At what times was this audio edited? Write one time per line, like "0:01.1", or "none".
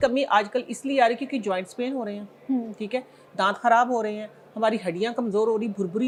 none